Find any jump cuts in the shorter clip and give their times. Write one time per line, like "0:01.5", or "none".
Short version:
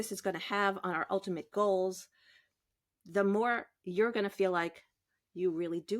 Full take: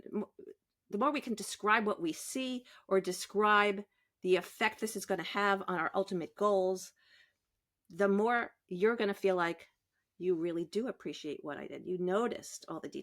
none